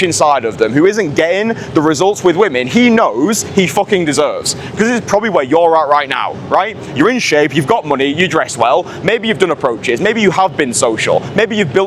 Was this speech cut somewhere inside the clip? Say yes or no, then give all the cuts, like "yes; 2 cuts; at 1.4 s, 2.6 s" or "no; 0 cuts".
no; 0 cuts